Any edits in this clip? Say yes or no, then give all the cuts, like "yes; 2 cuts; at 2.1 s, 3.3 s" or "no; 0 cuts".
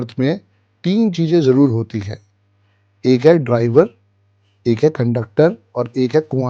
no; 0 cuts